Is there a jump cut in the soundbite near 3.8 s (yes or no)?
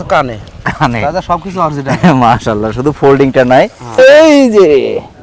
yes